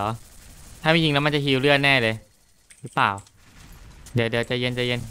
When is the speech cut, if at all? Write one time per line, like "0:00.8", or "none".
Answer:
none